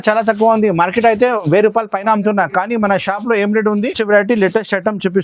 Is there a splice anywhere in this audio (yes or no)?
yes